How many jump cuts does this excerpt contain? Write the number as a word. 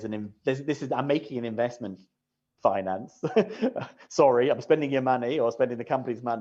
zero